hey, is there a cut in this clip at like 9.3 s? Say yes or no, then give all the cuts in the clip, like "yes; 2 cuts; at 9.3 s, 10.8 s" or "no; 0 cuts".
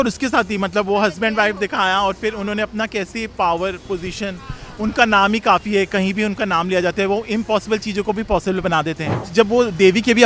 yes; 1 cut; at 9.3 s